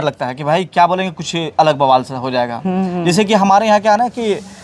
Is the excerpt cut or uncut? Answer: uncut